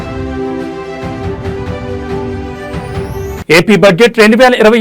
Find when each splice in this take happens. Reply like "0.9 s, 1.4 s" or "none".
2.5 s